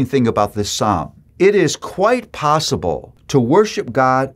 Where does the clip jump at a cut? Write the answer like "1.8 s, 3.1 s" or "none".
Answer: 1.2 s, 3.1 s